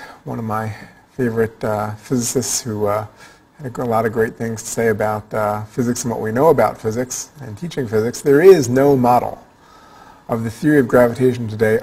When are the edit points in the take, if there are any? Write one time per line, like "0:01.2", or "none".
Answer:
none